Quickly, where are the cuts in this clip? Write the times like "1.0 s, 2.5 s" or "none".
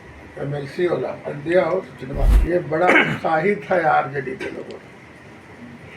2.3 s